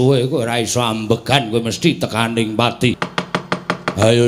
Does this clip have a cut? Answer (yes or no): yes